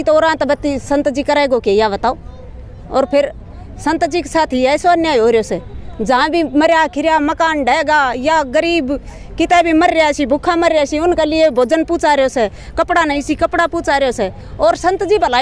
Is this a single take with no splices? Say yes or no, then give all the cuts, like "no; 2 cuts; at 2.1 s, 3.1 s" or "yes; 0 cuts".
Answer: yes; 0 cuts